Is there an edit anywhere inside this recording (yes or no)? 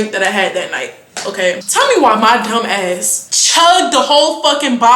yes